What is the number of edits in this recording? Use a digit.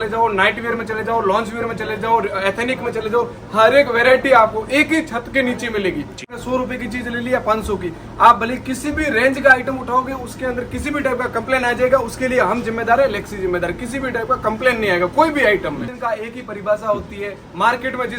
2